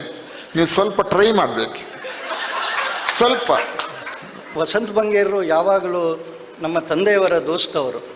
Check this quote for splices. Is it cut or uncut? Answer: cut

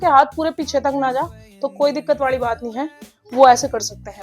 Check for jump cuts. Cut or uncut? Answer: uncut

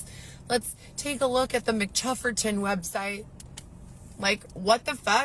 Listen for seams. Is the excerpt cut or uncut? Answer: cut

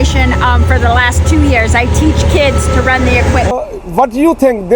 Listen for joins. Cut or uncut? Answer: cut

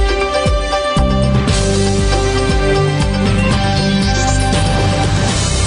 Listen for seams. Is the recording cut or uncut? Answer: uncut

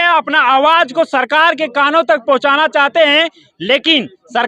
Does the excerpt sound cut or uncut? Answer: uncut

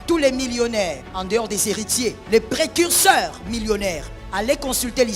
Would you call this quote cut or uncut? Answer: cut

